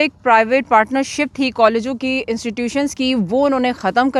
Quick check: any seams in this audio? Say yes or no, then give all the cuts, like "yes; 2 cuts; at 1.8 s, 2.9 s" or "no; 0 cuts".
no; 0 cuts